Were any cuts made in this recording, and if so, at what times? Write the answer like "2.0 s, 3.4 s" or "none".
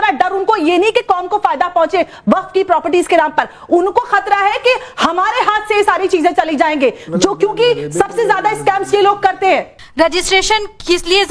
none